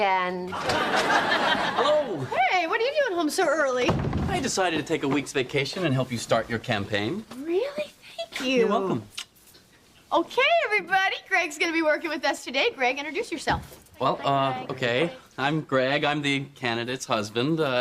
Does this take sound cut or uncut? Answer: cut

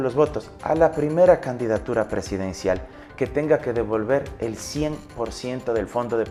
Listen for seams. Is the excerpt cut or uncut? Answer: uncut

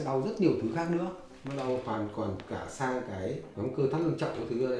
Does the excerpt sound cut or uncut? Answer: uncut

